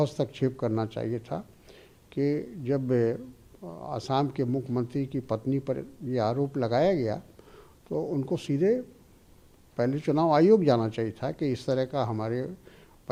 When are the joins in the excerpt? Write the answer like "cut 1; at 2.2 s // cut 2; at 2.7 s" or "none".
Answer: none